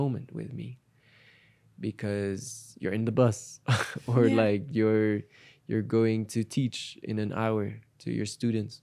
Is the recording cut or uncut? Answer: uncut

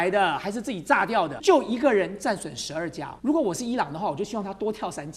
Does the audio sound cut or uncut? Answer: cut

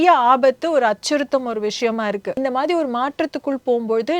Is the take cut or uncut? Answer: cut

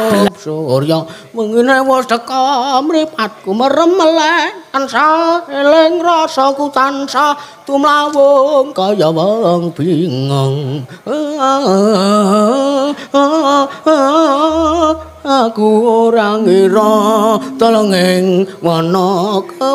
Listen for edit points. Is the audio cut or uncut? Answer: uncut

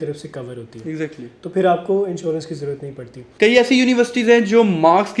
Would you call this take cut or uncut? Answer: cut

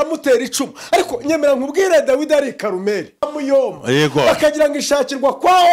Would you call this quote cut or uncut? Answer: cut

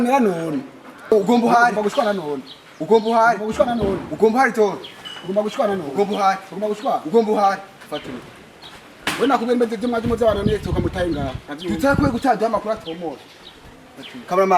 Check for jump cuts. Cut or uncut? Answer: cut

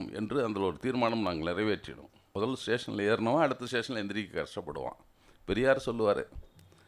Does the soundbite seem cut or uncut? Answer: cut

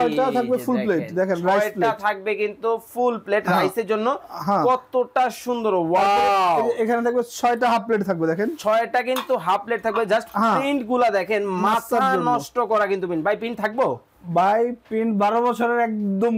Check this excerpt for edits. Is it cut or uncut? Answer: uncut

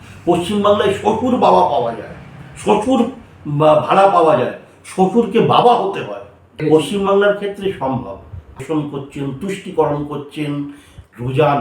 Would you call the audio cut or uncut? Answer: cut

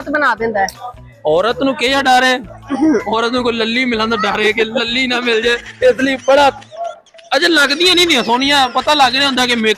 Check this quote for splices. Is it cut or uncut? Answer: uncut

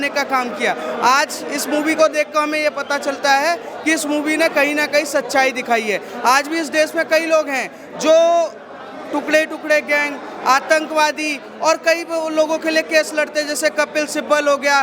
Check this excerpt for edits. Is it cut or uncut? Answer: uncut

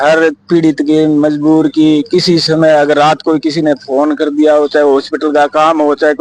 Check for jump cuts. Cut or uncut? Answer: uncut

